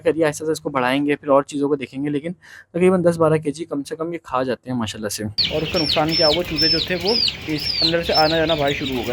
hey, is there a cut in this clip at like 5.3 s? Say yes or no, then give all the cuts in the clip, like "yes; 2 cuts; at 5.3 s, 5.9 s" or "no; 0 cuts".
yes; 1 cut; at 5.3 s